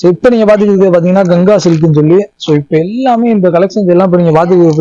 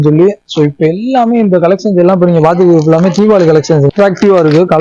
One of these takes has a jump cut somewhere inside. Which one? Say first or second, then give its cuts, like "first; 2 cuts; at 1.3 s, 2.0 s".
second; 1 cut; at 3.9 s